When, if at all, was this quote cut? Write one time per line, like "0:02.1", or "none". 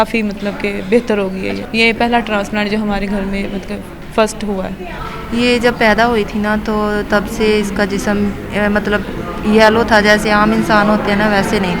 0:01.6
0:04.9